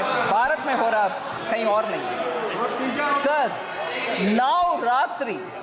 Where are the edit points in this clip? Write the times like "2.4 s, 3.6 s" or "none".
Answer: none